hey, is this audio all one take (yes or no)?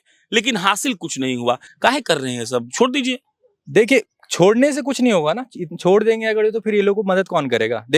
yes